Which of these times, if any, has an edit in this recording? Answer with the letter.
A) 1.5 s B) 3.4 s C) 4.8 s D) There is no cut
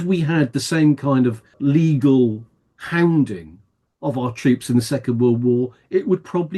A